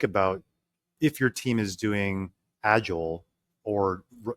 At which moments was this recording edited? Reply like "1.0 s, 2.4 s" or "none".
0.9 s